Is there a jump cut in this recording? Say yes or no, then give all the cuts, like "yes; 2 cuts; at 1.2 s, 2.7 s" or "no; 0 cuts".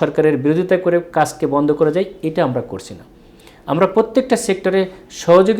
no; 0 cuts